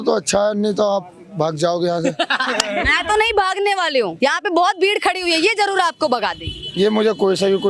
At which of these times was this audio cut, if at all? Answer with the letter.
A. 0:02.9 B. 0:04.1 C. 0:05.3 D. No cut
B